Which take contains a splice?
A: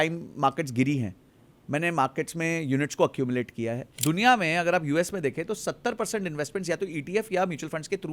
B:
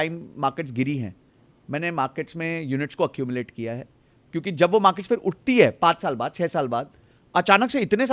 A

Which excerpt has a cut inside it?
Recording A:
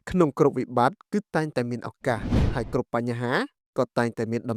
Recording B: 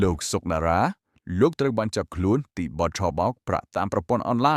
A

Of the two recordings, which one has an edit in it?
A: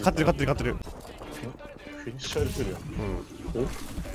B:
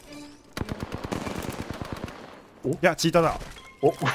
A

